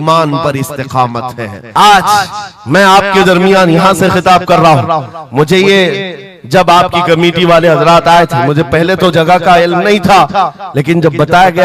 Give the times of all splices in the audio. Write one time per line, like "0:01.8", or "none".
0:01.6